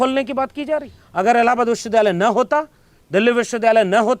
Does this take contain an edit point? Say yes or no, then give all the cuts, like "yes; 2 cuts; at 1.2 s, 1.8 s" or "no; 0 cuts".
yes; 1 cut; at 1.0 s